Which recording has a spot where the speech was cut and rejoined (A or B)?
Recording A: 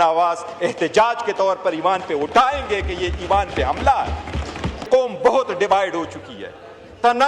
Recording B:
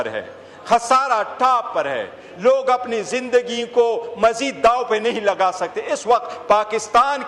A